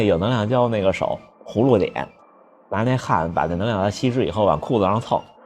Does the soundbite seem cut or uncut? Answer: uncut